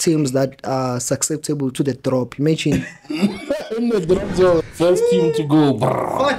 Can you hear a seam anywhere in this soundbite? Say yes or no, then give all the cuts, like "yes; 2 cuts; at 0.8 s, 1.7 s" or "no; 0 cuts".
yes; 1 cut; at 4.6 s